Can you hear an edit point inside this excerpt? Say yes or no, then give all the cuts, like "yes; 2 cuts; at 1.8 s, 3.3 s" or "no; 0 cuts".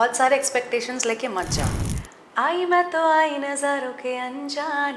yes; 1 cut; at 1.8 s